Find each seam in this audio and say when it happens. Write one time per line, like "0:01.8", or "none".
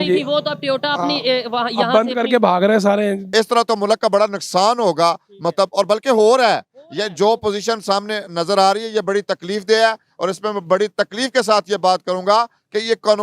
0:03.2